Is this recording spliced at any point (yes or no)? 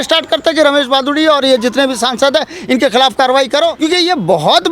yes